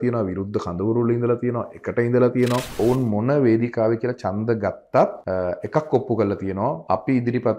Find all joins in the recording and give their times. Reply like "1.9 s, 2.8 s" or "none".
2.7 s, 5.2 s, 6.8 s